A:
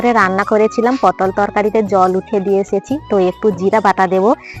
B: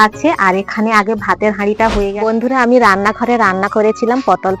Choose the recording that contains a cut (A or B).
B